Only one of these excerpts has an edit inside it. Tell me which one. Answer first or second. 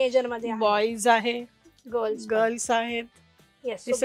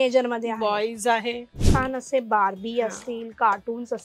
second